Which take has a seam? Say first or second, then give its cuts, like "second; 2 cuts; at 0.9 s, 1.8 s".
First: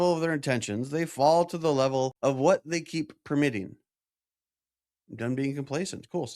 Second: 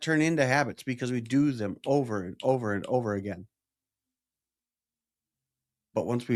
first; 1 cut; at 2.1 s